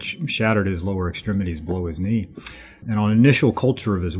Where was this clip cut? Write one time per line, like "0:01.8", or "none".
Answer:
0:02.4